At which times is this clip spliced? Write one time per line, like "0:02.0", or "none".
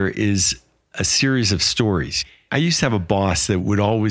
0:02.2